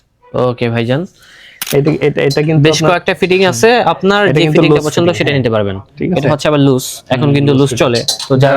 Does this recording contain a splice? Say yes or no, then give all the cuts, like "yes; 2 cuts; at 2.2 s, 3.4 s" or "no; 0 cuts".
yes; 1 cut; at 1.6 s